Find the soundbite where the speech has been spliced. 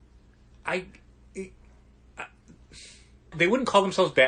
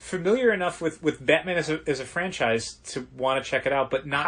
first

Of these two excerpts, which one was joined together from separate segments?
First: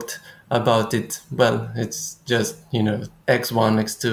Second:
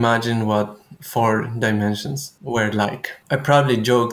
second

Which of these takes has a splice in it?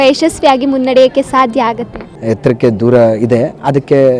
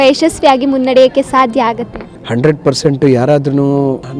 first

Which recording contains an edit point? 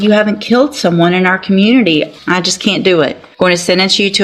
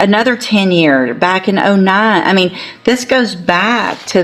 first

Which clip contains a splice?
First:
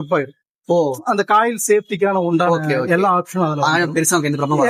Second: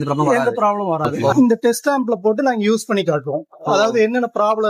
second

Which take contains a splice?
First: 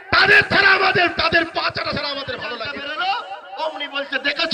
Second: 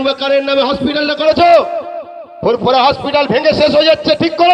first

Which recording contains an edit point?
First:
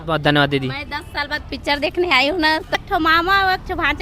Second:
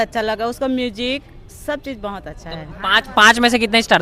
first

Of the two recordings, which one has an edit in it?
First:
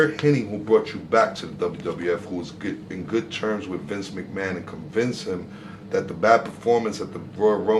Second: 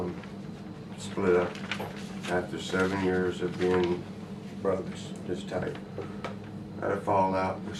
first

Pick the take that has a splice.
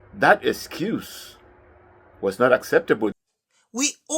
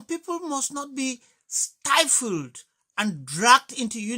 first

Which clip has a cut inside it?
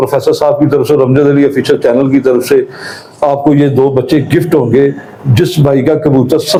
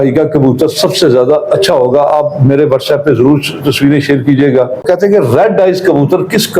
second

